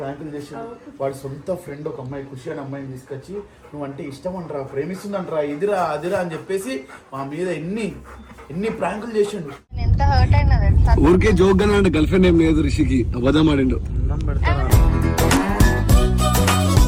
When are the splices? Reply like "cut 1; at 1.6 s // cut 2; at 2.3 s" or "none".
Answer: none